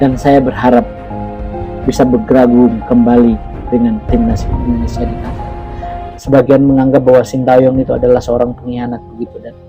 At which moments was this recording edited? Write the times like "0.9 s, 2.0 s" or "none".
6.0 s